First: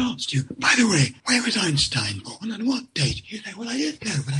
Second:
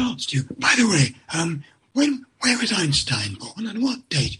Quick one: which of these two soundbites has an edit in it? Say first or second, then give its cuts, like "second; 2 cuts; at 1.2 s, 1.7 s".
first; 1 cut; at 1.2 s